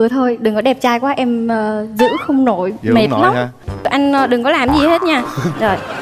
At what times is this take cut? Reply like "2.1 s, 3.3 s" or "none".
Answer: 3.7 s